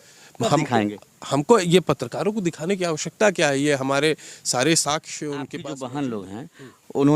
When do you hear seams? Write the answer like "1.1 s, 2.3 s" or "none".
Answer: 5.6 s